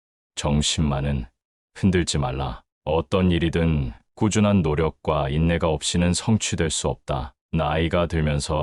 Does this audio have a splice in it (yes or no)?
yes